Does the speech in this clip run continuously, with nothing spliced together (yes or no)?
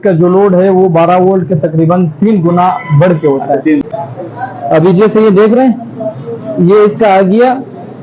no